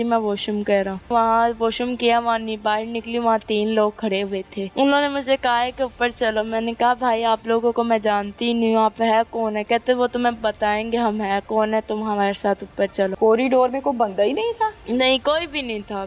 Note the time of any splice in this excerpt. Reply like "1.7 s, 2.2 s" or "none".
1.1 s, 4.6 s, 13.1 s